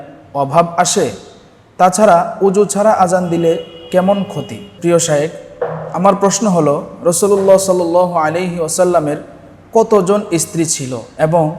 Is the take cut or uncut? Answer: cut